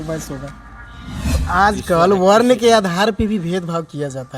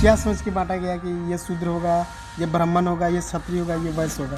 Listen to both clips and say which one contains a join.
first; 1 cut; at 1.4 s

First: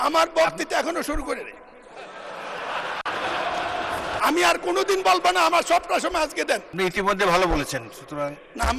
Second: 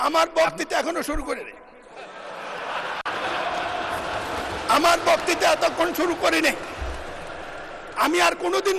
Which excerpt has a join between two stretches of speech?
first; 2 cuts; at 4.2 s, 6.7 s

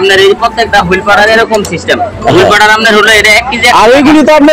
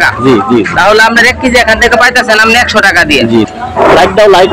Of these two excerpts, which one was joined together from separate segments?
second; 1 cut; at 3.6 s

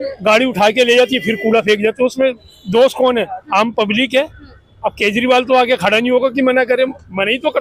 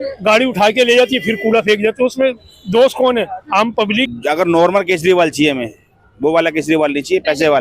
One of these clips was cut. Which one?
second; 1 cut; at 4.1 s

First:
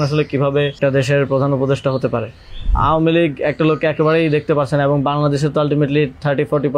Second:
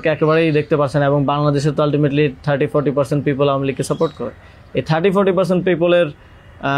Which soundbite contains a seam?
first; 2 cuts; at 0.8 s, 2.7 s

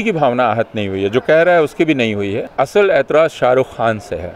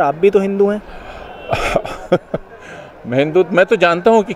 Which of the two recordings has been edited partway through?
first; 1 cut; at 2.4 s

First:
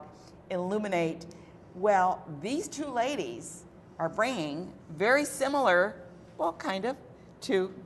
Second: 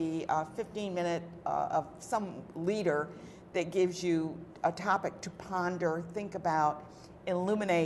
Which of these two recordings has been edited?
first; 1 cut; at 6.3 s

